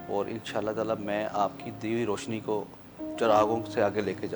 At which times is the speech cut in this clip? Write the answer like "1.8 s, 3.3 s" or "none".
none